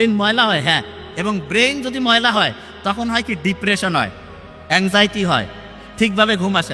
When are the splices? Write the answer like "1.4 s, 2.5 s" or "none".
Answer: none